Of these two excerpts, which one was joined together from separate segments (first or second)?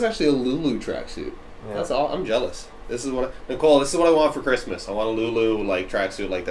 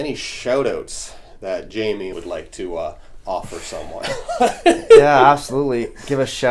second